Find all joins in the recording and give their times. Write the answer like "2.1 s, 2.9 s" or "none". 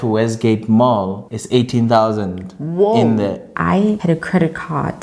3.5 s